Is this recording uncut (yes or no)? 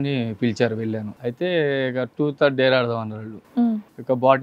no